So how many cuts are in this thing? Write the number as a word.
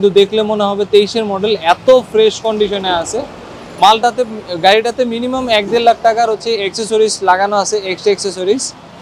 zero